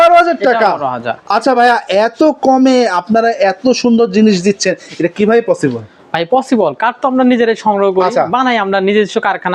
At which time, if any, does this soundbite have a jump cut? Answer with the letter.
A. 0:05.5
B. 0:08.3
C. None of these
C